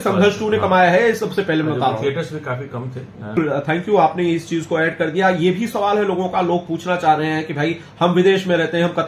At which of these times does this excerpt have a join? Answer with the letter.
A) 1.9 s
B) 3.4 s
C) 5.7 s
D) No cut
B